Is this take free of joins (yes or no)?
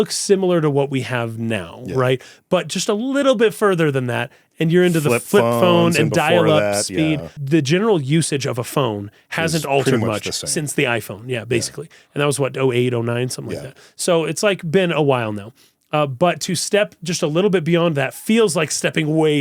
no